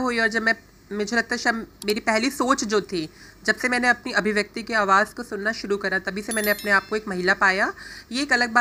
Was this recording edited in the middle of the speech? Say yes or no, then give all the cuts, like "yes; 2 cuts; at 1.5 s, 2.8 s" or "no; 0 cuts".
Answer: no; 0 cuts